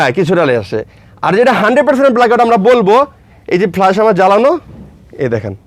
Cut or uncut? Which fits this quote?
uncut